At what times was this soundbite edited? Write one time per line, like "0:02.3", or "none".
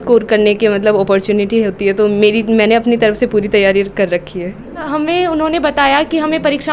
0:04.9